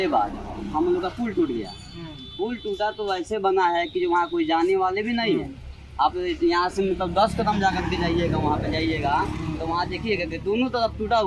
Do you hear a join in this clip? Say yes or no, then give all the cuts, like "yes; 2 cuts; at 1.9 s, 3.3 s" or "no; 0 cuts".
no; 0 cuts